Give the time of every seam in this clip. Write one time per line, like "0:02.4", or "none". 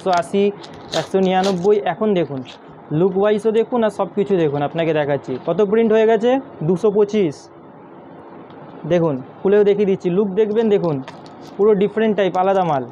none